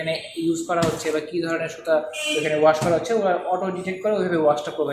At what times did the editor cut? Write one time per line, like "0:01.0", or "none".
none